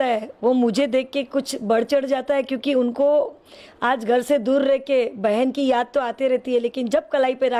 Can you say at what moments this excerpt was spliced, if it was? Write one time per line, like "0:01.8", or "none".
none